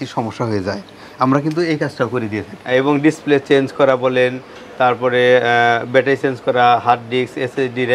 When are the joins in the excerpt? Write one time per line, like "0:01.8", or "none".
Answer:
0:02.6